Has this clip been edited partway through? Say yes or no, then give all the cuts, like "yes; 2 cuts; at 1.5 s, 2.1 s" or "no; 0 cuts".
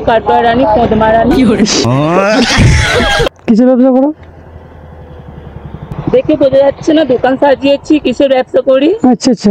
yes; 2 cuts; at 3.3 s, 5.9 s